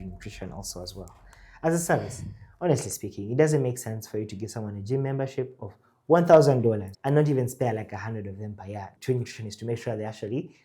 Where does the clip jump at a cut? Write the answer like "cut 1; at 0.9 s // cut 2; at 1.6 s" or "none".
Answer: none